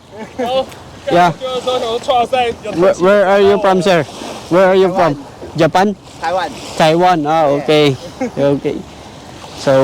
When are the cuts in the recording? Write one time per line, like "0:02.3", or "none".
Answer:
none